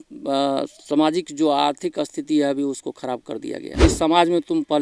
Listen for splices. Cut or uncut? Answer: cut